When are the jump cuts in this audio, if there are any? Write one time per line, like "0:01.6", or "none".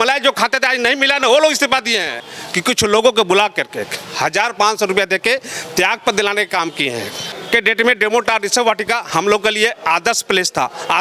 0:02.2
0:07.3